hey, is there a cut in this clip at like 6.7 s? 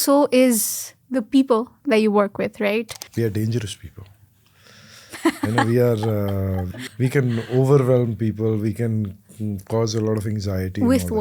yes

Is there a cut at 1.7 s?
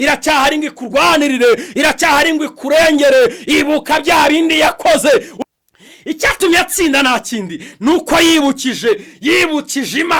no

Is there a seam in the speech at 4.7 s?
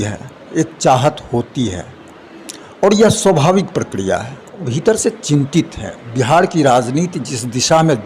yes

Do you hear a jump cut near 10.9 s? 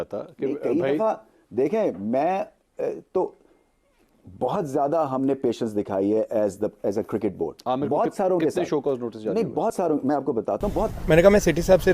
yes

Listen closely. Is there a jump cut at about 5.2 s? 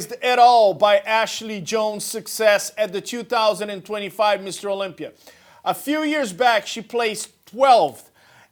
no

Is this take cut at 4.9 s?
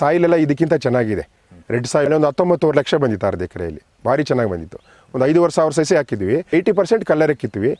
no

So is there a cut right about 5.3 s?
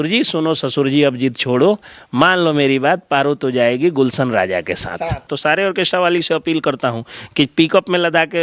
yes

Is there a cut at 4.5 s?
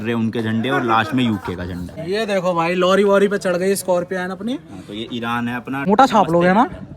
no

